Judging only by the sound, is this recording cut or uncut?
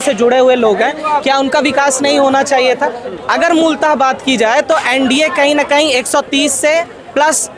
cut